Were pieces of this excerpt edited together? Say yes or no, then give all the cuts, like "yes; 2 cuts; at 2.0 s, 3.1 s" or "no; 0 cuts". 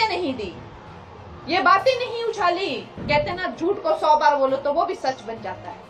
yes; 1 cut; at 2.9 s